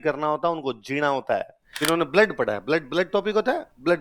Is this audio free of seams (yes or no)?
no